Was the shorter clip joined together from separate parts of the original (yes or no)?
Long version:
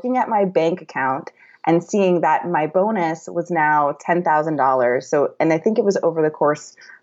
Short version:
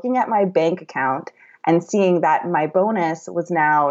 no